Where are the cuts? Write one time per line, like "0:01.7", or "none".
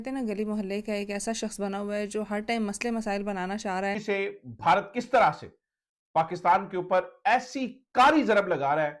0:04.0